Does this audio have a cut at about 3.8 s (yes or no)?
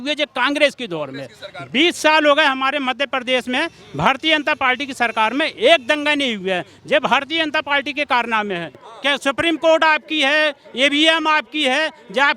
no